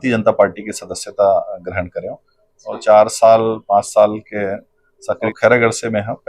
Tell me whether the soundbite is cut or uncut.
cut